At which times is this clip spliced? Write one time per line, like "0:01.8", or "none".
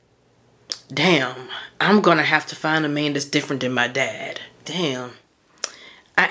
0:04.7